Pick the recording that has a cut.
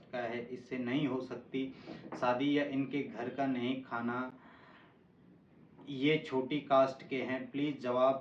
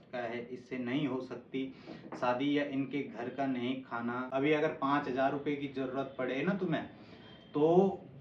second; 1 cut; at 4.3 s

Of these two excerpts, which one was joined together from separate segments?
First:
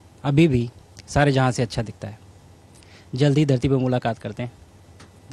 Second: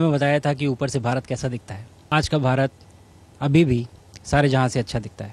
second; 1 cut; at 2.1 s

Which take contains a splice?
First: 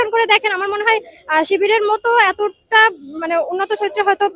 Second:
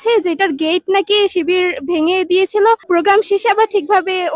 second; 1 cut; at 2.8 s

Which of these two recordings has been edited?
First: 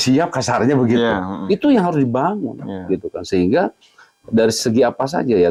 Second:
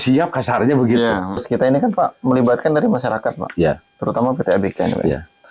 second; 1 cut; at 1.4 s

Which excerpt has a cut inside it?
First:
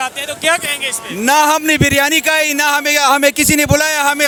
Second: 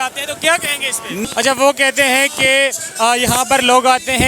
second; 1 cut; at 1.2 s

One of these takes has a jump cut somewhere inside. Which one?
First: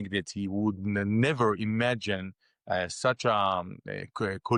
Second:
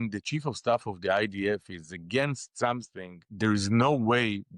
second; 1 cut; at 3.3 s

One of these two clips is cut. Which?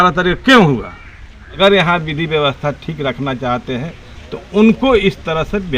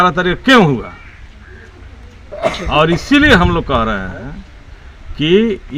first; 1 cut; at 1.4 s

